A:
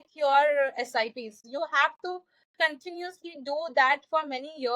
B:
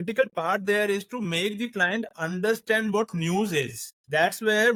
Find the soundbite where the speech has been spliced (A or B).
A